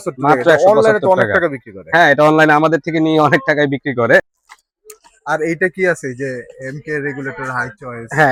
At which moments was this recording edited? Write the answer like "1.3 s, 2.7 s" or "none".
none